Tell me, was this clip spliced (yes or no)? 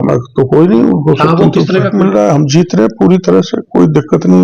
yes